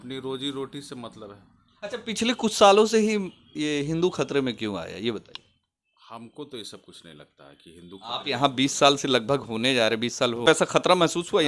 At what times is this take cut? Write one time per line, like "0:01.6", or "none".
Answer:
none